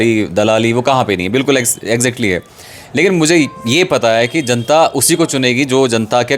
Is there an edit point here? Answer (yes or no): no